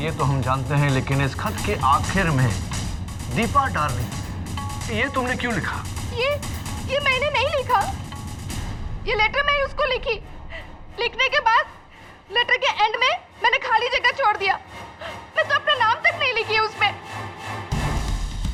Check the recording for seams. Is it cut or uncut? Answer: uncut